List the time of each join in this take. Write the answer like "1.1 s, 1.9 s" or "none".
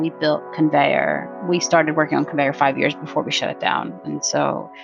1.3 s

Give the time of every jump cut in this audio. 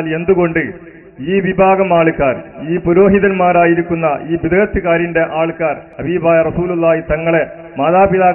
5.9 s

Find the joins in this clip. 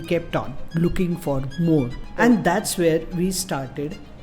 2.0 s

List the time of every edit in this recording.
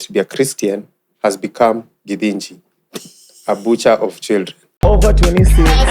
4.6 s

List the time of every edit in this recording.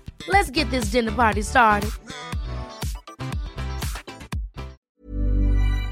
4.8 s

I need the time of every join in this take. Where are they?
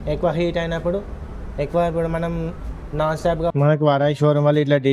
3.5 s

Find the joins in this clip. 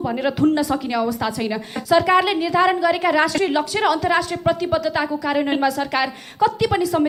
none

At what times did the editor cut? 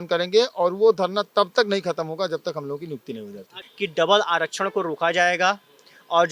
3.6 s

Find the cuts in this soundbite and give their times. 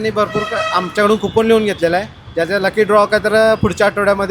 none

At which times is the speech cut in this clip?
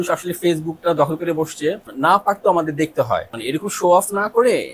1.9 s, 3.3 s

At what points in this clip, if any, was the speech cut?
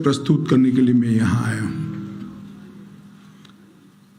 none

